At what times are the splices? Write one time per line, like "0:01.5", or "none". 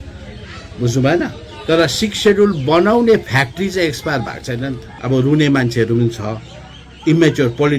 0:04.9